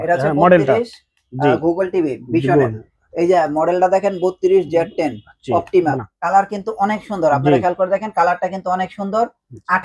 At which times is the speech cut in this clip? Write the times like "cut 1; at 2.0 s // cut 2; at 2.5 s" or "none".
cut 1; at 6.0 s